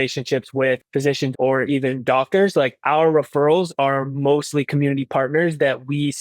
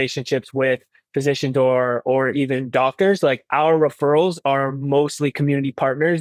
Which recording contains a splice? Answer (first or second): first